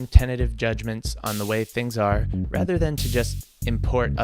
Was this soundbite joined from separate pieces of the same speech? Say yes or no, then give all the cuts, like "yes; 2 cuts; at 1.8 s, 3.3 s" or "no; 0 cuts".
no; 0 cuts